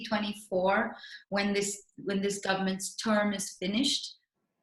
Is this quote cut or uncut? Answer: uncut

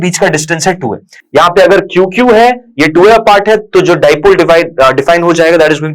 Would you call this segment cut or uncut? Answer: uncut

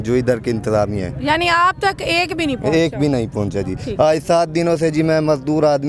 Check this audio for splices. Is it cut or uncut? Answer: uncut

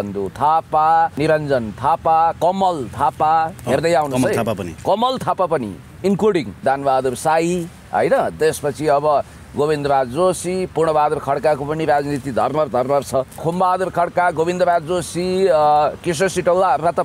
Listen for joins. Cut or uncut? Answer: cut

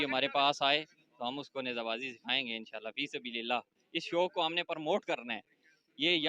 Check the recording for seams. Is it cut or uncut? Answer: uncut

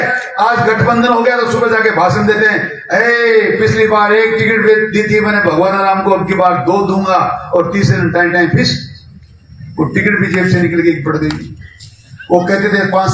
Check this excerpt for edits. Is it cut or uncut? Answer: uncut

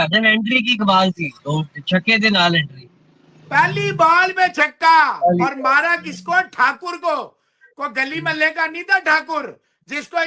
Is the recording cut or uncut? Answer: uncut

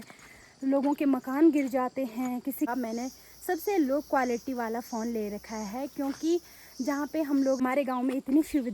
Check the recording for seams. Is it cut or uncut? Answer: cut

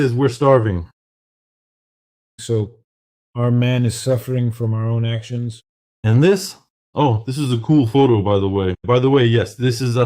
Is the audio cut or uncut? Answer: cut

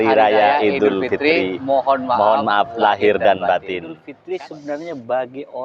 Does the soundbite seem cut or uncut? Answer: cut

